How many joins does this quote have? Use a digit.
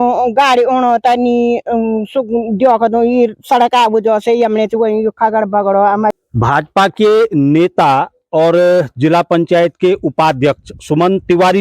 1